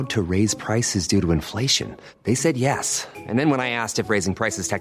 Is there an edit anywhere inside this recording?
no; 0 cuts

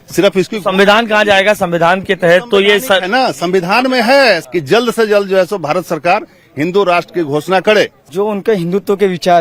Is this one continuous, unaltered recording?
yes; 0 cuts

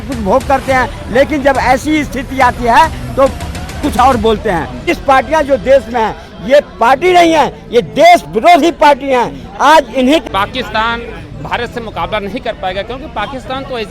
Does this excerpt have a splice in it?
yes; 2 cuts; at 4.9 s, 10.2 s

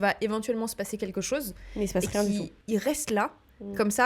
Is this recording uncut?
no; 1 cut; at 2.6 s

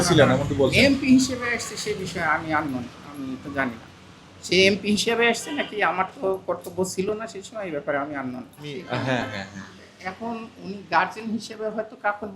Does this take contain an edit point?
yes; 1 cut; at 8.8 s

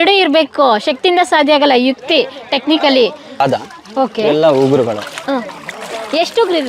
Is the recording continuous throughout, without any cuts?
no; 1 cut; at 3.4 s

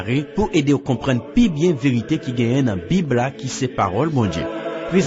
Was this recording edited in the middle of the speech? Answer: no; 0 cuts

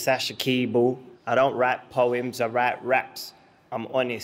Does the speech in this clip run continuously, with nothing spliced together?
no; 1 cut; at 1.1 s

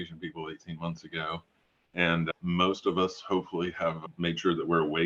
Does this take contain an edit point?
no; 0 cuts

